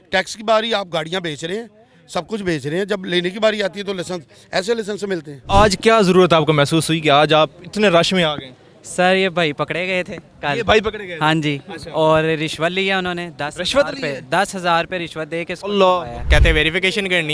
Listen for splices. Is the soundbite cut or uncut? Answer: cut